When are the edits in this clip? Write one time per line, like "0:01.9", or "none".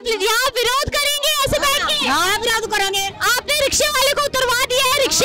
none